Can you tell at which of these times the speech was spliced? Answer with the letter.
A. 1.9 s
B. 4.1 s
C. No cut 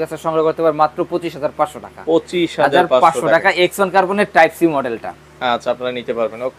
C